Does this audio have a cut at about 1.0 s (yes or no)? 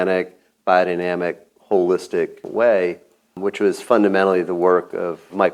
no